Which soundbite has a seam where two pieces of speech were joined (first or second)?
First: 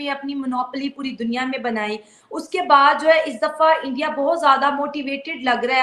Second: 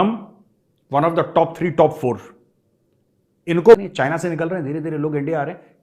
second